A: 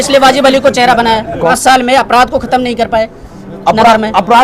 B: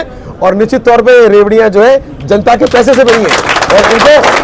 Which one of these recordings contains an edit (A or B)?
A